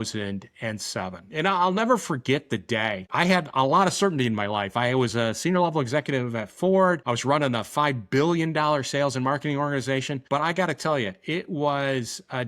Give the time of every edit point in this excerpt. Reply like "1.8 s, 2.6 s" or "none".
3.1 s, 7.0 s, 10.2 s